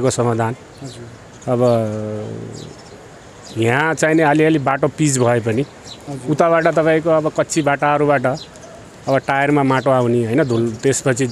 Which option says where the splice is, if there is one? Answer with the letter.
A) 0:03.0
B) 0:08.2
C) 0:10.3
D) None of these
D